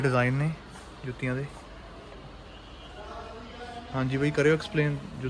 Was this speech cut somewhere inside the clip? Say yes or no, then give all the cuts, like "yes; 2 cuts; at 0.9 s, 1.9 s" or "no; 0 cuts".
no; 0 cuts